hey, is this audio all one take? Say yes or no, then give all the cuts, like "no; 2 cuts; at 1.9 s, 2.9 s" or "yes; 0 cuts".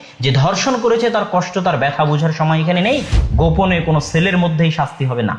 no; 1 cut; at 3.2 s